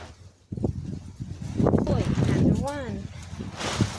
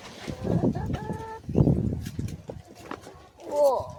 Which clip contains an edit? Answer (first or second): first